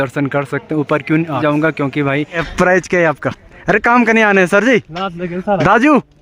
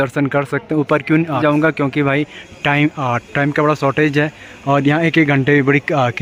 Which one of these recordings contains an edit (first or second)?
first